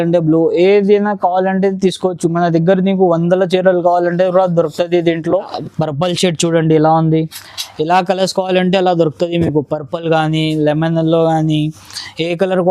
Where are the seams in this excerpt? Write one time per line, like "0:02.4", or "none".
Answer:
0:05.6